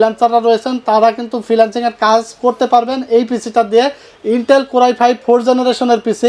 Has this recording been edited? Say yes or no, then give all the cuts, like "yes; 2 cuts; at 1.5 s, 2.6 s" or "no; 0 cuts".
no; 0 cuts